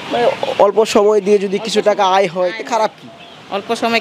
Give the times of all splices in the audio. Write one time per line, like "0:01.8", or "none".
none